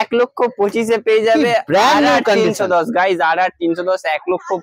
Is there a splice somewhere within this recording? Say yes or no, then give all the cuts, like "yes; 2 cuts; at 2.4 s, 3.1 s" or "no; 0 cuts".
no; 0 cuts